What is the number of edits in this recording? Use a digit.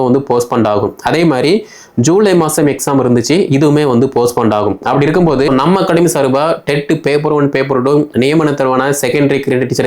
1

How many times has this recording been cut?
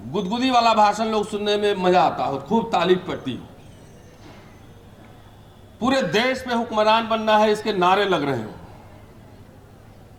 0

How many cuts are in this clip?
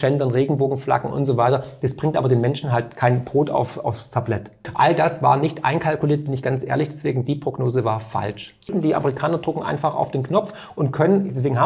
2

